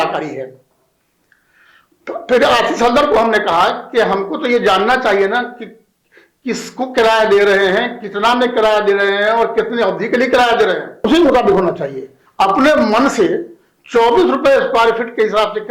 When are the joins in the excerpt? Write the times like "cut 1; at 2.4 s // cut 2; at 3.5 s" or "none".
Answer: cut 1; at 11.0 s